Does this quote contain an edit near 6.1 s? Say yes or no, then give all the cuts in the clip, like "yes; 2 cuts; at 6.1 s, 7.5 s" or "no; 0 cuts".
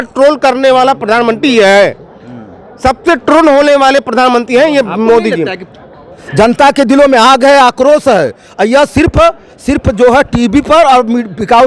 yes; 1 cut; at 6.1 s